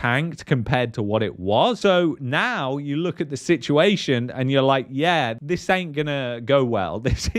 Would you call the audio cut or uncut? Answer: uncut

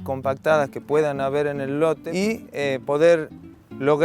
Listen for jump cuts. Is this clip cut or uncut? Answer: cut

